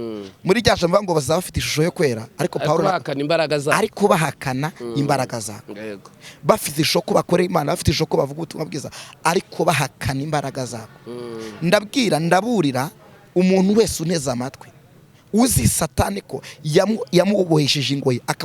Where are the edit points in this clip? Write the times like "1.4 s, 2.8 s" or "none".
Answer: none